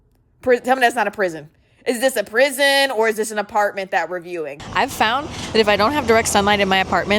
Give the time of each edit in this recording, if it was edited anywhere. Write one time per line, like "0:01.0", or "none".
0:04.6

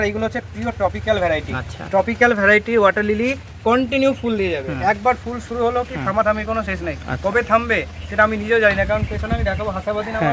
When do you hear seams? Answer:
none

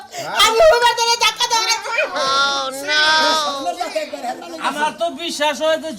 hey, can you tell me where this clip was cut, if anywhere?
0:04.5

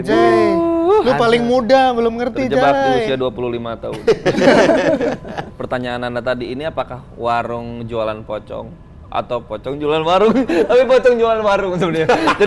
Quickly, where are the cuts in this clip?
0:05.5

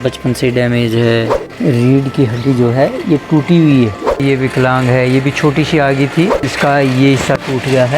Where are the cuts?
0:01.4
0:04.2
0:06.4

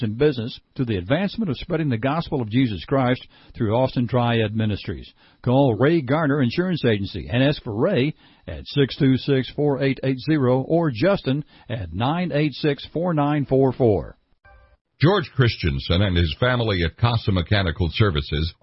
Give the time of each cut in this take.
0:14.3

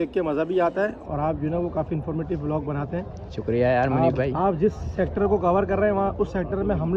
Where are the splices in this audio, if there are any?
none

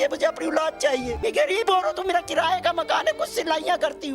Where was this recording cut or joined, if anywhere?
0:01.2

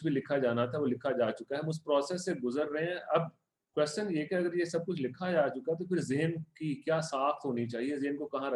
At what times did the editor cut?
none

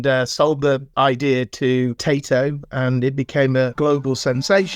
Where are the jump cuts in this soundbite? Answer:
0:00.9
0:02.0
0:03.7

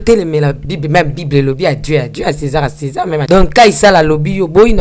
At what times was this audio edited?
0:03.2

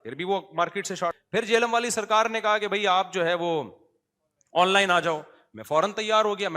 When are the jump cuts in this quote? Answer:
0:01.2

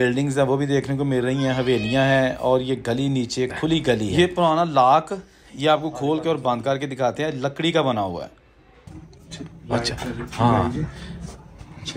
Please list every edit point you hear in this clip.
0:04.1

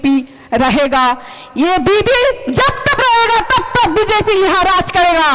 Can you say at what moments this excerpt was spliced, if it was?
none

